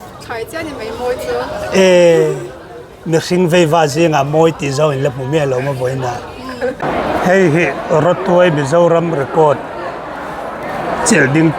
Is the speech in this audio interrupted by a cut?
yes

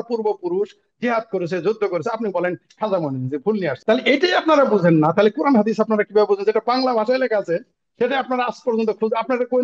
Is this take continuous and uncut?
no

